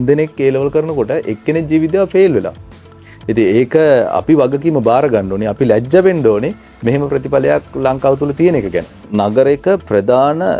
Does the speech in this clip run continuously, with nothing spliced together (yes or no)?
yes